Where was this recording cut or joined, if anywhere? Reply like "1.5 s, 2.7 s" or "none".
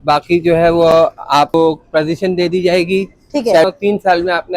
1.5 s, 3.6 s